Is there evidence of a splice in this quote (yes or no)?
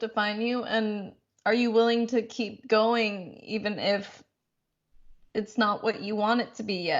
no